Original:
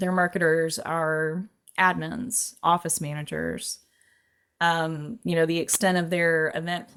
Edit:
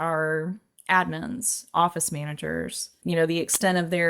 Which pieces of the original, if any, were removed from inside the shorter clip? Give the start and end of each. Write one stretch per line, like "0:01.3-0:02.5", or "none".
0:03.8-0:05.1